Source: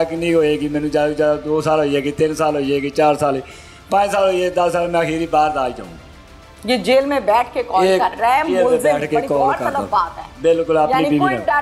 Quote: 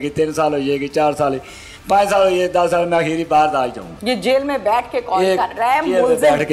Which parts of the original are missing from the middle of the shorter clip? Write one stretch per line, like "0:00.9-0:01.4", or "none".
0:05.9-0:06.5